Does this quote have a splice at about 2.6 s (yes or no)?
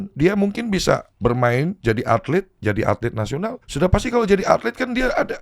yes